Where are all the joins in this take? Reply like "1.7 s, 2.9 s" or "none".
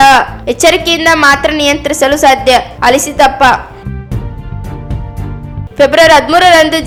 none